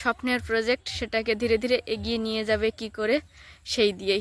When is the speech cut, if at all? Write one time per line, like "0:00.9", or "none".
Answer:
none